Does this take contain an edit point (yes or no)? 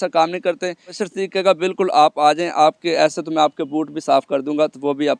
yes